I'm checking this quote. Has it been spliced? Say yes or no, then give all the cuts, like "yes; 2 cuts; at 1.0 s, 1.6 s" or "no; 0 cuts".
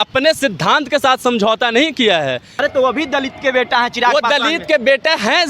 yes; 1 cut; at 2.5 s